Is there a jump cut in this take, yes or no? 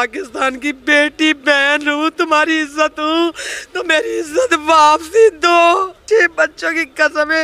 yes